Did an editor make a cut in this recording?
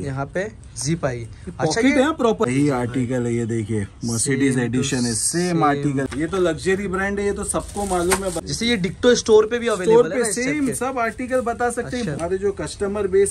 yes; 4 cuts; at 2.5 s, 6.1 s, 8.4 s, 12.1 s

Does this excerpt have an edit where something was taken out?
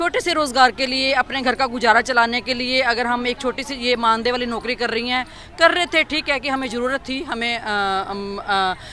no; 0 cuts

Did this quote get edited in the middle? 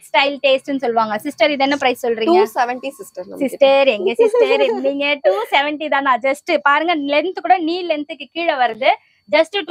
no; 0 cuts

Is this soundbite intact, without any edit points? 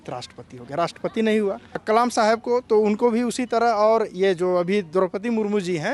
no; 1 cut; at 1.8 s

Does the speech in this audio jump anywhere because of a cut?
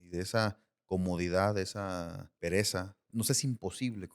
yes; 2 cuts; at 2.2 s, 3.1 s

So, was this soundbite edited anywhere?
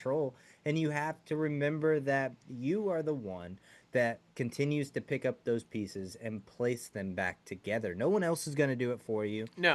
no; 0 cuts

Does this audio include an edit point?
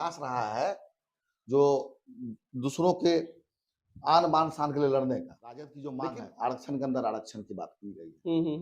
yes; 1 cut; at 5.8 s

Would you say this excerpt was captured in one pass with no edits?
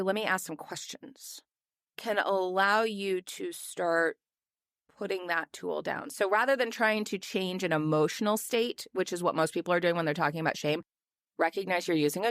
no; 1 cut; at 10.9 s

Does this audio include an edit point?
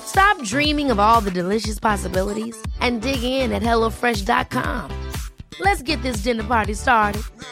no; 0 cuts

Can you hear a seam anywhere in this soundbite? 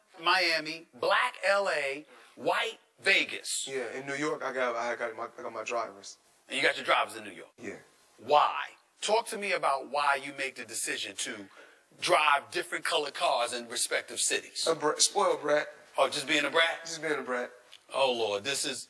yes; 1 cut; at 7.0 s

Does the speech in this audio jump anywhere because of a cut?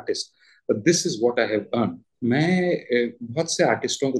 yes; 1 cut; at 2.1 s

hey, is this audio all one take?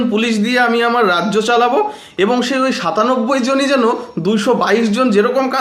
yes; 0 cuts

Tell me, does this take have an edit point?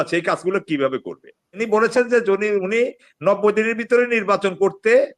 yes; 1 cut; at 1.4 s

